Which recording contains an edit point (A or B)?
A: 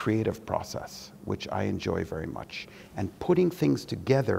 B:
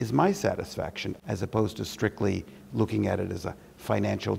B